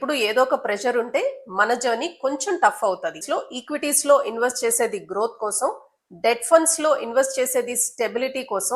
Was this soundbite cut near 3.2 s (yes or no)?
yes